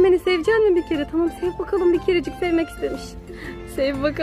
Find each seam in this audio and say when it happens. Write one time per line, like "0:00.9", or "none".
none